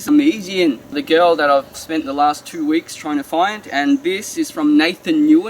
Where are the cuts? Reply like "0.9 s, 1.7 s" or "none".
1.0 s, 1.8 s